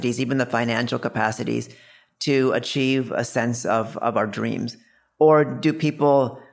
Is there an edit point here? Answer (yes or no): no